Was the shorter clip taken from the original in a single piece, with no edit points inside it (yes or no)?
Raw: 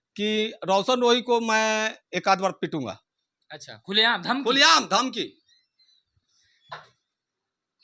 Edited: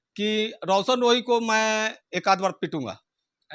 yes